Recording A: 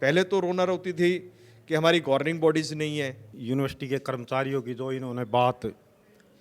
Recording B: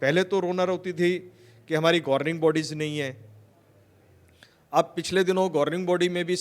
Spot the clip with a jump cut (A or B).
A